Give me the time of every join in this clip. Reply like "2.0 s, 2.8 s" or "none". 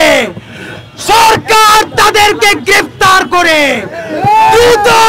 none